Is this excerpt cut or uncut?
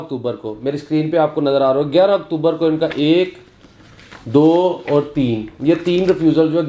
uncut